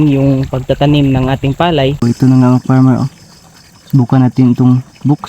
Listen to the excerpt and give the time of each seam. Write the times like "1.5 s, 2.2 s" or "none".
2.0 s